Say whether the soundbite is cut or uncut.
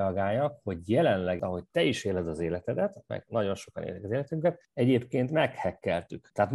cut